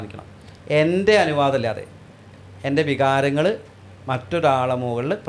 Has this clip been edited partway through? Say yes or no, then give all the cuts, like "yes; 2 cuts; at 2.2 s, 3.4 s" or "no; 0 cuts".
no; 0 cuts